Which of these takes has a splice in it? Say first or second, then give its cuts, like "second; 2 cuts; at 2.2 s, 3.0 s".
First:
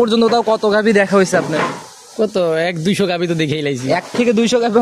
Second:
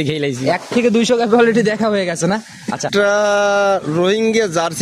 second; 1 cut; at 2.9 s